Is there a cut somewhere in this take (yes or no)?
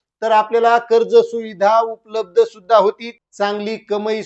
yes